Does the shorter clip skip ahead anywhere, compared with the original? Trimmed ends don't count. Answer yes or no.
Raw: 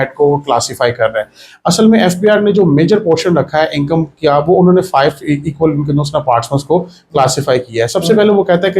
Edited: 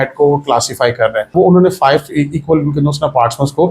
yes